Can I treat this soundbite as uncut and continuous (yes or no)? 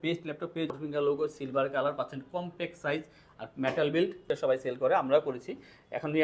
no